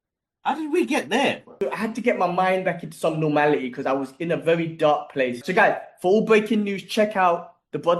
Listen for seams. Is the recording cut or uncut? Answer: cut